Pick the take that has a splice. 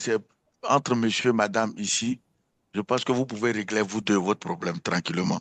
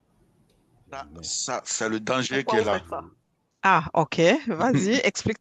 second; 1 cut; at 1.0 s

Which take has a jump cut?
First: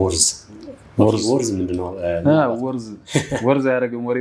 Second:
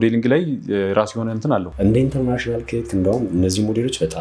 second; 1 cut; at 1.7 s

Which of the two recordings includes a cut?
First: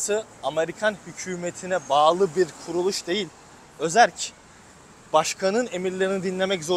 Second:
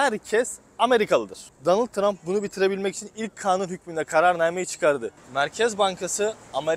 second; 2 cuts; at 1.6 s, 5.2 s

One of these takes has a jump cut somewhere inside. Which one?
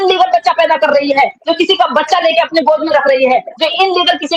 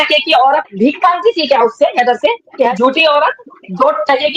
second; 1 cut; at 2.7 s

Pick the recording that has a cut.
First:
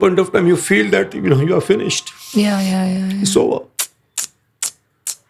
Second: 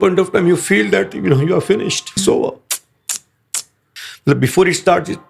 second; 2 cuts; at 2.2 s, 3.8 s

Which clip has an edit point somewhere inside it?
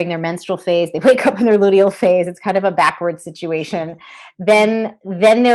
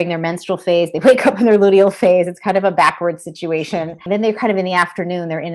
second; 1 cut; at 4.0 s

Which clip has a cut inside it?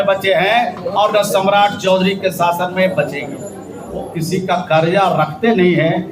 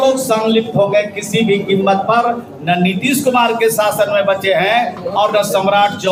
first; 1 cut; at 4.1 s

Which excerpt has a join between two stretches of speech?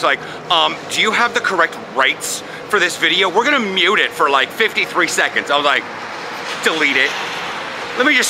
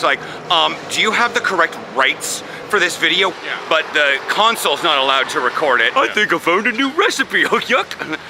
second; 2 cuts; at 3.3 s, 5.9 s

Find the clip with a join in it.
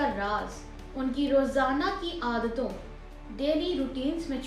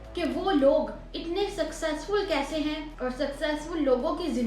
second; 1 cut; at 2.9 s

